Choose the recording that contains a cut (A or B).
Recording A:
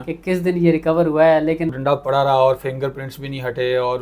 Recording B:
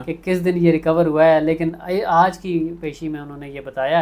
A